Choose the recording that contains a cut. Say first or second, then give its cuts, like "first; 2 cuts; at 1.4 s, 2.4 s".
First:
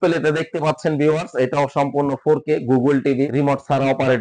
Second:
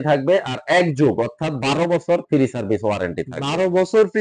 first; 1 cut; at 3.3 s